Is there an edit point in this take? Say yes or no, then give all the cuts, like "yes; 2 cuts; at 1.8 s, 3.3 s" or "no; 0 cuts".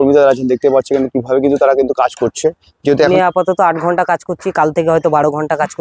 yes; 1 cut; at 3.1 s